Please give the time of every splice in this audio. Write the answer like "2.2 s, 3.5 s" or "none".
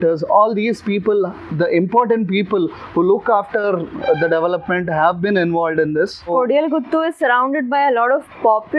6.3 s